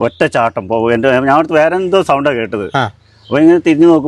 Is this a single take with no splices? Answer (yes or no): yes